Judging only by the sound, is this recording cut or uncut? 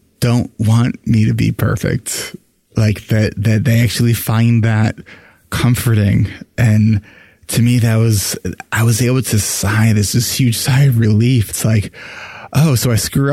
uncut